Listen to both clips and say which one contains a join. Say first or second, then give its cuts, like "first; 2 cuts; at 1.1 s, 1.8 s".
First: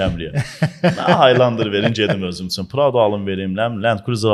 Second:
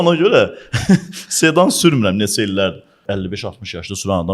second; 1 cut; at 3.0 s